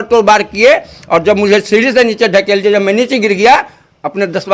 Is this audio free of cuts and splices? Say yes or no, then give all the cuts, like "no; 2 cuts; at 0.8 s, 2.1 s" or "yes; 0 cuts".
yes; 0 cuts